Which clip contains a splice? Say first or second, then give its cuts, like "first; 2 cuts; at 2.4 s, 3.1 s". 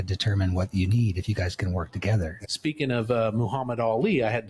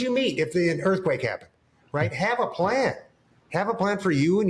first; 1 cut; at 2.4 s